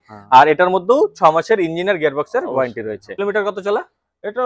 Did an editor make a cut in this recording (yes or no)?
yes